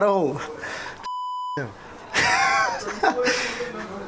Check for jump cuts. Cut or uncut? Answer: uncut